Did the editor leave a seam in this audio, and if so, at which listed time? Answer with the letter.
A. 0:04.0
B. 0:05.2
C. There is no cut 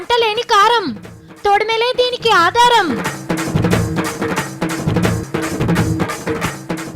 B